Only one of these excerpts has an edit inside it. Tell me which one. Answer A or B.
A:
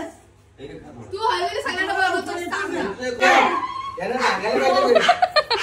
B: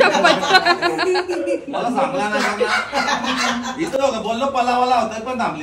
A